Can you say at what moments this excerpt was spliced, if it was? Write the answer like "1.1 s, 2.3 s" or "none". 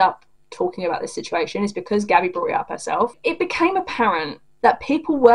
3.1 s, 4.4 s

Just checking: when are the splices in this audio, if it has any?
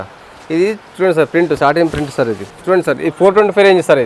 none

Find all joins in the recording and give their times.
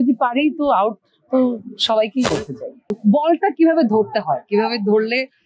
3.0 s

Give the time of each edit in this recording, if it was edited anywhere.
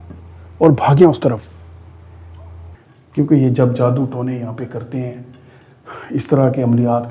2.8 s

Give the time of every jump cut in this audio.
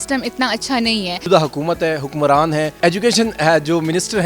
1.2 s, 2.7 s

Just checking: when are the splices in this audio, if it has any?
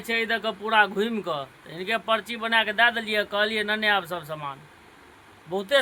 none

